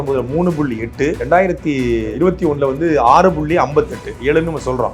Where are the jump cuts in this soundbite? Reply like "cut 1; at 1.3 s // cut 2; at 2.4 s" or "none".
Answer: cut 1; at 1.2 s // cut 2; at 2.1 s